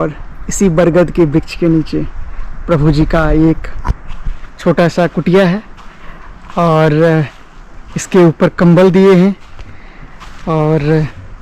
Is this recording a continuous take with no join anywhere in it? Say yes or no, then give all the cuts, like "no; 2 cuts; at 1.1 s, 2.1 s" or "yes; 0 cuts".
yes; 0 cuts